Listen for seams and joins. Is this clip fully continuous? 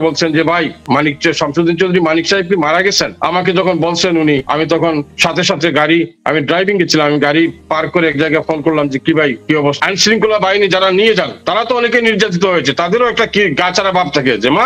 no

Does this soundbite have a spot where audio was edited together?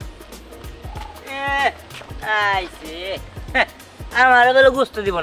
no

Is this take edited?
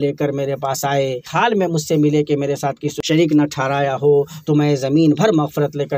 yes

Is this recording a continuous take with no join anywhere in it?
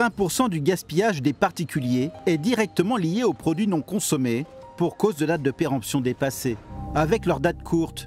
no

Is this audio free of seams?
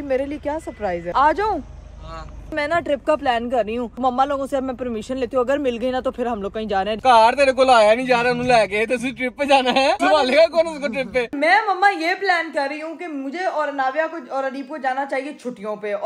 no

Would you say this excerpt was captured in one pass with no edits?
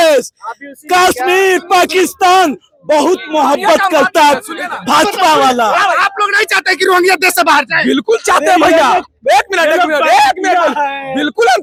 yes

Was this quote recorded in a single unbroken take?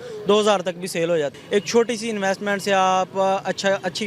no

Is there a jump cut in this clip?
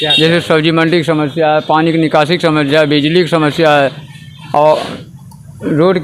no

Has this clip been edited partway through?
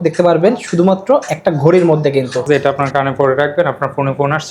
yes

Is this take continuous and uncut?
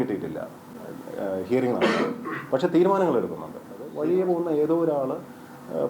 no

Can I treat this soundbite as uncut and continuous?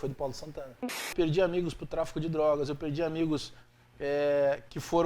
no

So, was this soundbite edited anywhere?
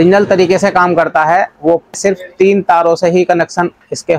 yes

